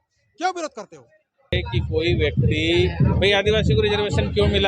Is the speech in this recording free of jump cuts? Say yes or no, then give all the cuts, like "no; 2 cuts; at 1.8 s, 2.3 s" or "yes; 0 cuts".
no; 1 cut; at 1.5 s